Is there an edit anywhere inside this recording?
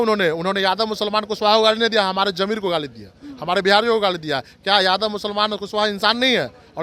no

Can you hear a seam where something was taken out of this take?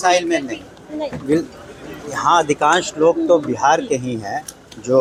no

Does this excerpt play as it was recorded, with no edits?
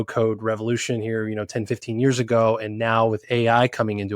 yes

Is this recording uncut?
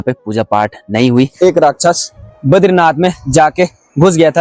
no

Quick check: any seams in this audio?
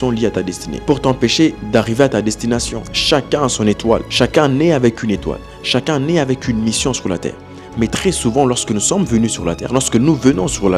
no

